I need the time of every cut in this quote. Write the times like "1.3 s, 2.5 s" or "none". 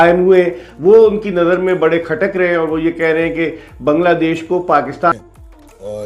5.1 s